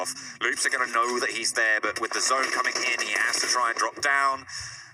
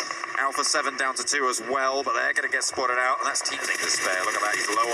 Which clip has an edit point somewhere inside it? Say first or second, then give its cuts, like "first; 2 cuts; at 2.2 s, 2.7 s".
second; 1 cut; at 3.6 s